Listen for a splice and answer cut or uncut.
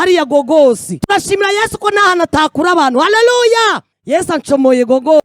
cut